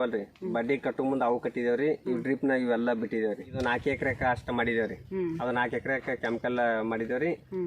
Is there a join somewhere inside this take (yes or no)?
yes